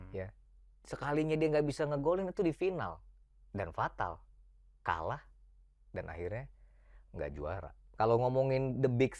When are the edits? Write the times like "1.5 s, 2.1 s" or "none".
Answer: 7.9 s